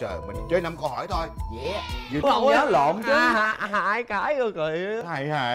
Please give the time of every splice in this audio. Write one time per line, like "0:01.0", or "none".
0:02.2

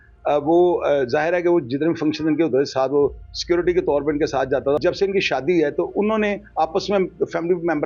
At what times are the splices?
0:04.8

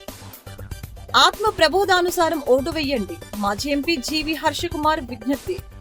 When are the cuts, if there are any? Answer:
none

